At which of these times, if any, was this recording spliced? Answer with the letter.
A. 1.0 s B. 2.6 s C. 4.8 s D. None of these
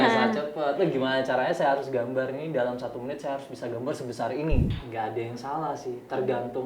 C